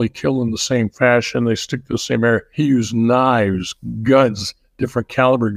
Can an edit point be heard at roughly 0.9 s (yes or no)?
no